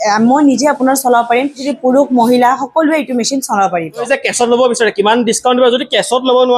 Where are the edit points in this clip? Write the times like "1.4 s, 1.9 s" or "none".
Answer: 1.7 s, 4.1 s